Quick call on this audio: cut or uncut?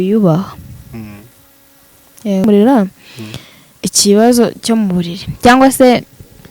cut